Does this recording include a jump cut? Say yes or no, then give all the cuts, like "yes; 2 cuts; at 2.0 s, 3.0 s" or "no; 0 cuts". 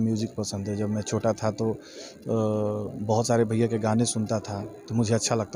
no; 0 cuts